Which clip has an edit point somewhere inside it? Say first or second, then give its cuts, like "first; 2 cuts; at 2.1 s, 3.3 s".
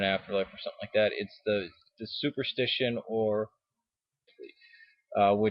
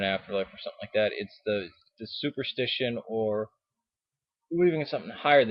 second; 1 cut; at 4.4 s